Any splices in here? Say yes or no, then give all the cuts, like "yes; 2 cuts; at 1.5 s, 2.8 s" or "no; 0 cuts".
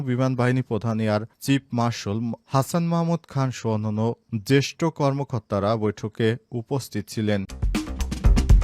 yes; 1 cut; at 7.6 s